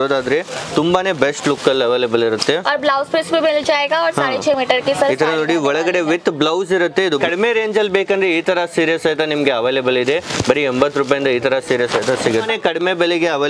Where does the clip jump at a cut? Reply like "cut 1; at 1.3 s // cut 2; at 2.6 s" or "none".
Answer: cut 1; at 7.2 s // cut 2; at 12.5 s